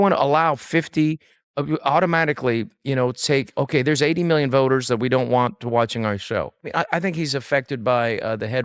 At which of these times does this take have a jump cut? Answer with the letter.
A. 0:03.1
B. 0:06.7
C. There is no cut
B